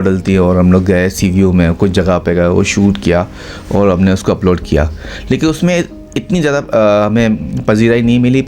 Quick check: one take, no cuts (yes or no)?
yes